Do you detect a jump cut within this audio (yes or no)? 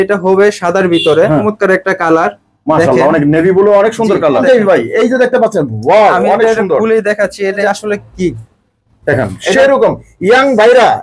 yes